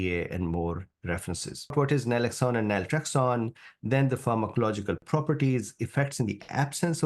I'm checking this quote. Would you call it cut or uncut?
cut